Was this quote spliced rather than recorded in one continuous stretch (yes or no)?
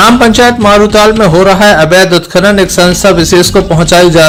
no